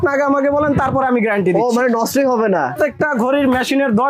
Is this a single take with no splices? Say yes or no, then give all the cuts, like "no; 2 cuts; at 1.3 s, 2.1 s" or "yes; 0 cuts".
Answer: no; 1 cut; at 2.7 s